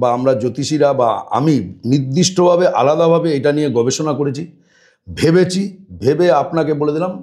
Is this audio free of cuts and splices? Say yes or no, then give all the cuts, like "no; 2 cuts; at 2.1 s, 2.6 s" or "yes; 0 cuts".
yes; 0 cuts